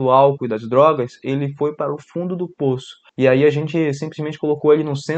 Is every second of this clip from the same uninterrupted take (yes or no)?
no